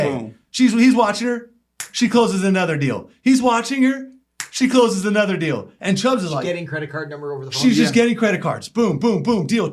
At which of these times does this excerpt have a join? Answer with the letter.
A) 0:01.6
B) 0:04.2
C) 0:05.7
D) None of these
C